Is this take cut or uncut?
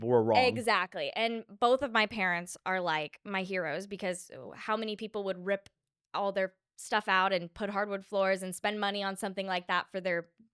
uncut